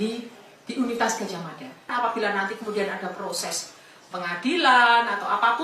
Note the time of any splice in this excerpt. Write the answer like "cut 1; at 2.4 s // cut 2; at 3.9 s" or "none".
cut 1; at 1.9 s